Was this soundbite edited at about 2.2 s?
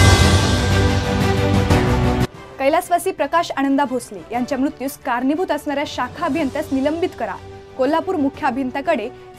yes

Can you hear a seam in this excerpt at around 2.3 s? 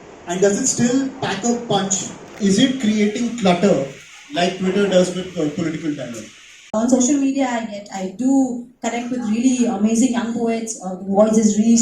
yes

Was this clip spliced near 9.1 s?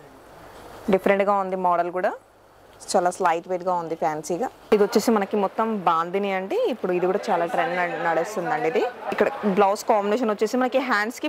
yes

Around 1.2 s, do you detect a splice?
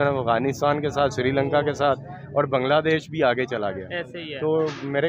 no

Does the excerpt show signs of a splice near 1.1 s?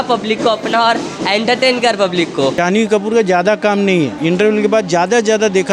no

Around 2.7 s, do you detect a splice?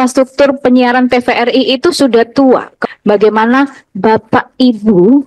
yes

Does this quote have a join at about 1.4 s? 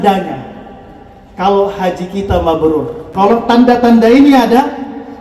no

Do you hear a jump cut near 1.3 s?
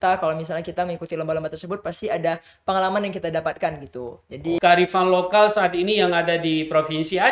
no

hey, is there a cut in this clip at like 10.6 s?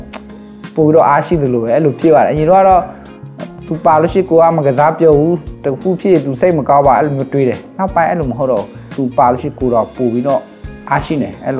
no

